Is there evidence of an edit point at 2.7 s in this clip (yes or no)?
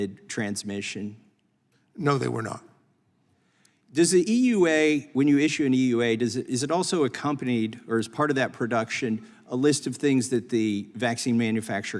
no